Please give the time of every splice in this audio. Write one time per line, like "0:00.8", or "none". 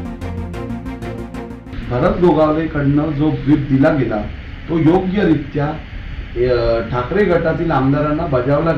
0:01.5